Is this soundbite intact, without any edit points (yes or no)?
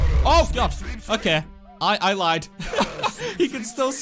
yes